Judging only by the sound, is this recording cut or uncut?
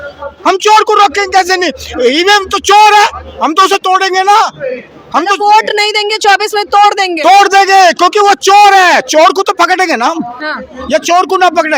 uncut